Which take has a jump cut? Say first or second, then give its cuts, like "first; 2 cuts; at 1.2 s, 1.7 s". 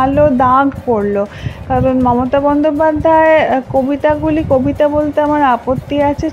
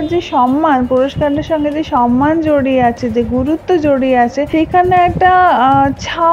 second; 1 cut; at 4.4 s